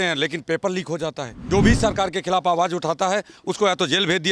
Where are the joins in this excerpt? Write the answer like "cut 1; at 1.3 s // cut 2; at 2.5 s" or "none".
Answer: cut 1; at 1.3 s